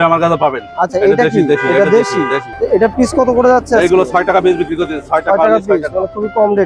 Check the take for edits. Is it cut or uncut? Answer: cut